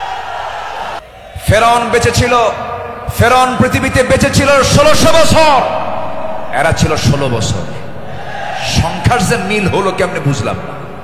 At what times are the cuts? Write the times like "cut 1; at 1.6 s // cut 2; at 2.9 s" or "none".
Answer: cut 1; at 1.0 s